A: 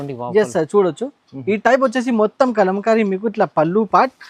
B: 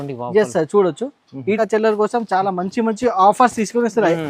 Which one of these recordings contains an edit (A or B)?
B